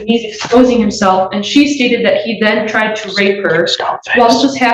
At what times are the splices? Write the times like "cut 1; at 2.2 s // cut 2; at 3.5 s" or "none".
none

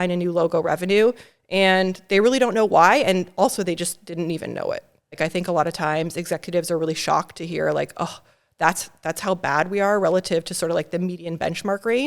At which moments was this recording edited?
cut 1; at 5.2 s

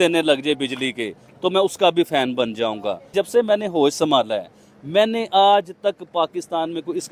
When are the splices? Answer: cut 1; at 3.1 s

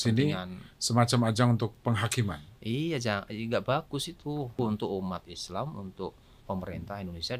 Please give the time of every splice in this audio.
cut 1; at 4.5 s

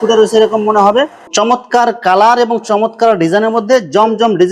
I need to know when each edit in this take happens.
cut 1; at 1.2 s

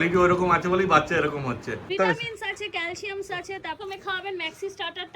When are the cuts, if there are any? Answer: cut 1; at 1.9 s // cut 2; at 3.8 s

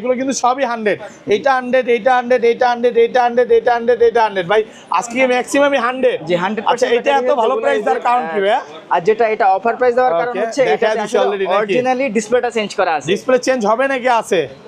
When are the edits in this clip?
none

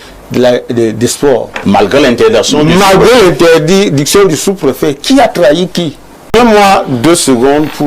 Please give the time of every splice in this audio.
cut 1; at 6.3 s

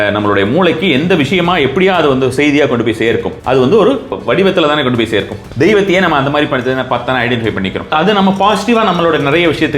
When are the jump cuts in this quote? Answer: cut 1; at 3.3 s // cut 2; at 4.2 s // cut 3; at 5.4 s // cut 4; at 7.9 s

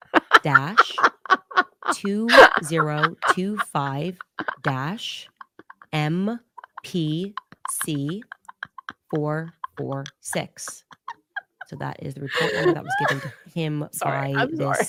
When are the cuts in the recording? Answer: none

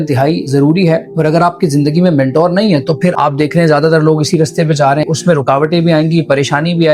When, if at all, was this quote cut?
cut 1; at 1.1 s // cut 2; at 3.1 s // cut 3; at 5.0 s

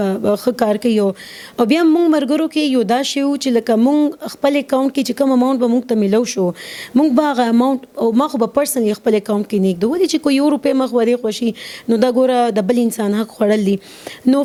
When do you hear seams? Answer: none

